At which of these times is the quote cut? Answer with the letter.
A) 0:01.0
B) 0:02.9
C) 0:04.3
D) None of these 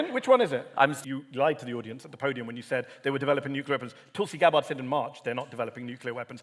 A